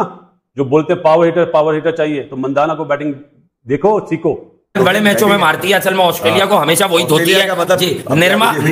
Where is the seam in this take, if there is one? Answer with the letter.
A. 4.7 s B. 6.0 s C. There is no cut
A